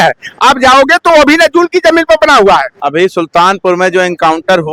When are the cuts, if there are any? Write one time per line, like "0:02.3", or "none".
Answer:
0:02.8